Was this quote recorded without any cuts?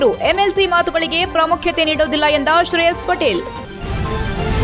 no; 1 cut; at 3.6 s

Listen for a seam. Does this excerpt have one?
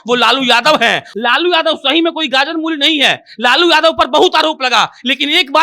yes; 1 cut; at 1.1 s

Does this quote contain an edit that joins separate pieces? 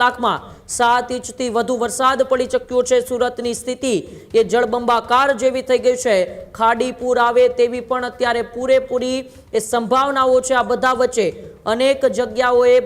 no; 0 cuts

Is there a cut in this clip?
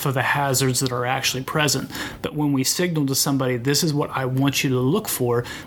no; 0 cuts

